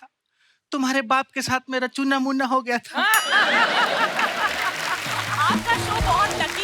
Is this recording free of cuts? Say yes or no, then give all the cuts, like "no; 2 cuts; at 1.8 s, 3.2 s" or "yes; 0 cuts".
no; 1 cut; at 5.2 s